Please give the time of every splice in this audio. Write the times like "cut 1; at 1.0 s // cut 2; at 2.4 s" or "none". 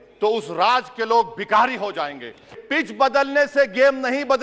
cut 1; at 2.6 s